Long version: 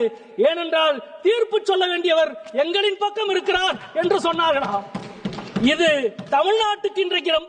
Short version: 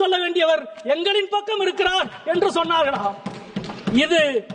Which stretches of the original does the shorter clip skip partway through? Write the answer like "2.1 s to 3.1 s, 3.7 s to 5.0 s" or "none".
none

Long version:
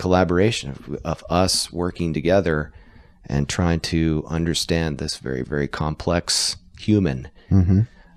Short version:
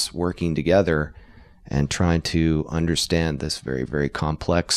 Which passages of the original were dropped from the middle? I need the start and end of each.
none

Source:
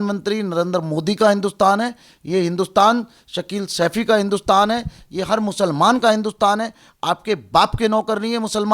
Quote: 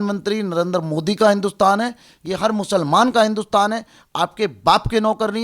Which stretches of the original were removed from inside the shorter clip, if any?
2.1 s to 5.0 s

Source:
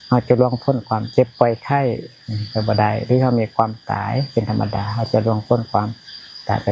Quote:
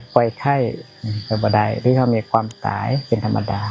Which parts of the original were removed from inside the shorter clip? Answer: none

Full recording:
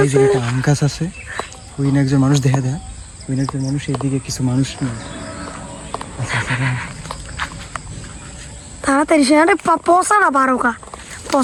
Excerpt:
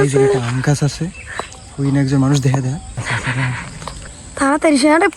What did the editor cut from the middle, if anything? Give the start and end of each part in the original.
2.9 s to 6.2 s, 7.3 s to 8.5 s

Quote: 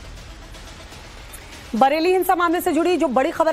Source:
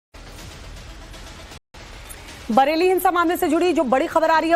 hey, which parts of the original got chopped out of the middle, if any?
1.6 s to 1.8 s

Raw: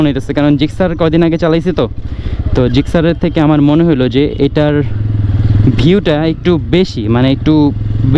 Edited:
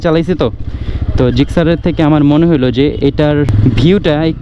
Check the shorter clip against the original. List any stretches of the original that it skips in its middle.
4.9 s to 5.5 s

